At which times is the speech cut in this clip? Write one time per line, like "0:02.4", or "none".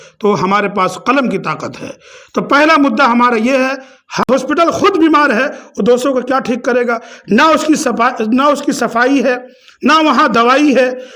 0:04.3